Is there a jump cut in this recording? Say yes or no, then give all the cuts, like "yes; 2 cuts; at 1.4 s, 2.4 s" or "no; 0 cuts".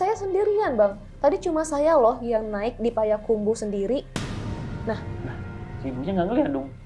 no; 0 cuts